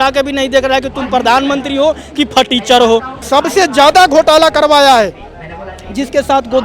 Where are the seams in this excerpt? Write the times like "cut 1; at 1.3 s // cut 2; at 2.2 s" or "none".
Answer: cut 1; at 3.1 s